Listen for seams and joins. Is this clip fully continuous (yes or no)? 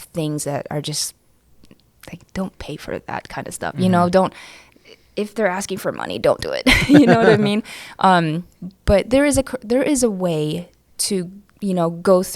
no